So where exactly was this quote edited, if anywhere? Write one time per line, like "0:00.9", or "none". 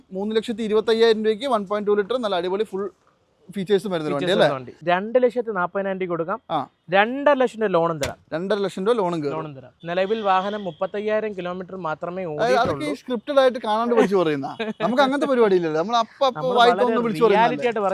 0:04.8
0:09.7